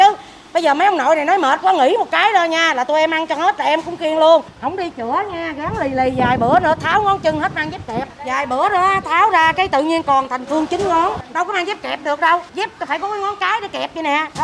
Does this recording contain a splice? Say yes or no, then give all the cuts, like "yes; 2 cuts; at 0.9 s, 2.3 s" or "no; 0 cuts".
yes; 4 cuts; at 4.5 s, 8.1 s, 11.2 s, 12.5 s